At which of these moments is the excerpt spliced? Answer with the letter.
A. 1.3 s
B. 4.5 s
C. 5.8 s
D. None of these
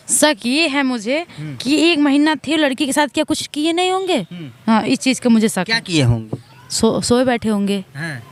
D